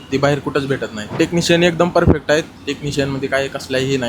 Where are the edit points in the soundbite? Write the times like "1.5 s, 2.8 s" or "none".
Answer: 1.2 s